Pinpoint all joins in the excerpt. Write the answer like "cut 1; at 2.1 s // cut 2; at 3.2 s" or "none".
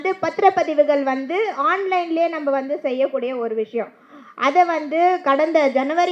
none